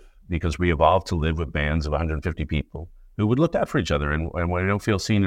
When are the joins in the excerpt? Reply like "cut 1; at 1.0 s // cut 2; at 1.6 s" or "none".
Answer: none